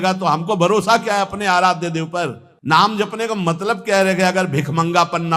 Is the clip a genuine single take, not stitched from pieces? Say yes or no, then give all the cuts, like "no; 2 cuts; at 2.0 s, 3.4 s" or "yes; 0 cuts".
no; 1 cut; at 2.5 s